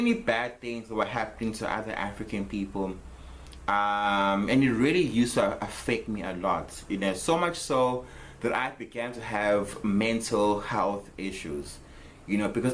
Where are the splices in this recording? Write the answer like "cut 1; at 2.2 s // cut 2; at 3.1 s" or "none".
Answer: none